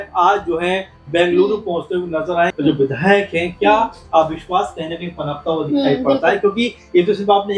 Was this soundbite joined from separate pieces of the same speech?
yes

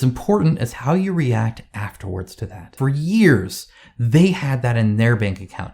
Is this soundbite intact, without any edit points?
no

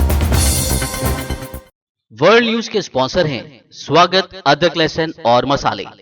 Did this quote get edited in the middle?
yes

